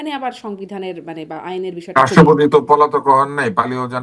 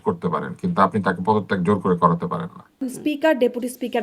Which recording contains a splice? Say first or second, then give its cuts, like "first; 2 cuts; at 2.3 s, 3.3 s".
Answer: second; 1 cut; at 2.9 s